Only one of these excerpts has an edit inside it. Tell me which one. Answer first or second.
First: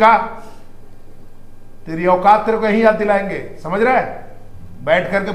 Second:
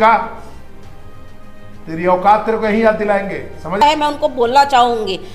second